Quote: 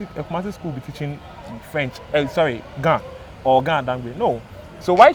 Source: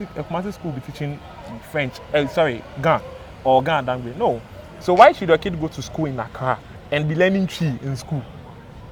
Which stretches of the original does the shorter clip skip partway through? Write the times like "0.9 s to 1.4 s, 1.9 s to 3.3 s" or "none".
none